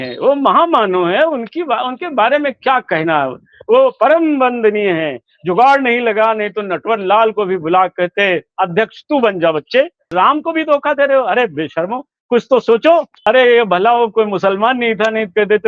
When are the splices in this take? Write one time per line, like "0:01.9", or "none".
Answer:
0:10.1
0:13.1